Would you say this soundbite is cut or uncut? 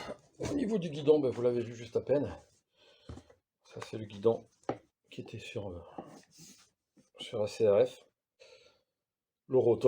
cut